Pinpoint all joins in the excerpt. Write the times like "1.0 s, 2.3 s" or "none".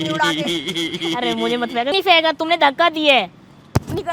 1.9 s